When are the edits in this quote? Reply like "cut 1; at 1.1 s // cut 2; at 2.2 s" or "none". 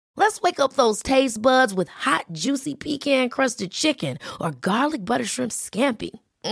none